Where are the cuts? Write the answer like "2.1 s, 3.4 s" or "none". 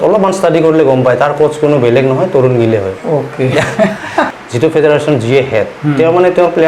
4.4 s